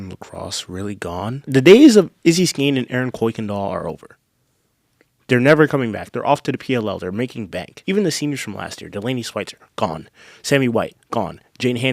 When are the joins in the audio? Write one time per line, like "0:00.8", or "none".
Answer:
0:01.5
0:07.7